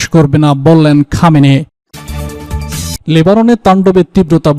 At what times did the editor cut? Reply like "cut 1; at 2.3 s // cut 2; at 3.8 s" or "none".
cut 1; at 1.7 s